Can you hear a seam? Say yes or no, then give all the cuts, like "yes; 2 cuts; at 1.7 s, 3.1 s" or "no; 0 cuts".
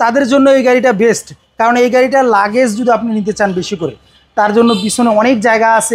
no; 0 cuts